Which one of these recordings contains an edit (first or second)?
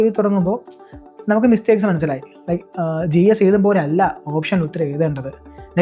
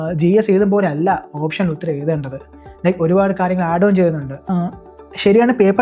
second